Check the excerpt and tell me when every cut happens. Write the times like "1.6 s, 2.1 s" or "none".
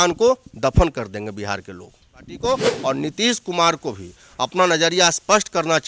2.3 s